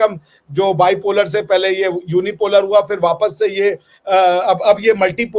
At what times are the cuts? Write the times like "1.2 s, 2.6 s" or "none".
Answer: none